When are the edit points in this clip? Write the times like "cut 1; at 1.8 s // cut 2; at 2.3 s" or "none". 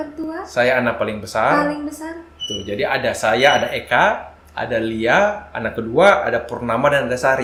none